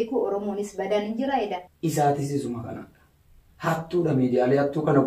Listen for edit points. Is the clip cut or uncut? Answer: cut